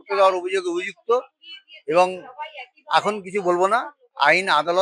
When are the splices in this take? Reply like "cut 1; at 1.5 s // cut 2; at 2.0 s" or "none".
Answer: none